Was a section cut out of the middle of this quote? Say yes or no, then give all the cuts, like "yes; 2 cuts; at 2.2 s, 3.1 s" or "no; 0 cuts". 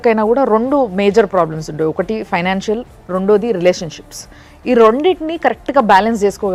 no; 0 cuts